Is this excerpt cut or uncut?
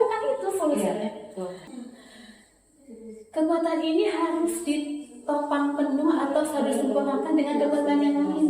cut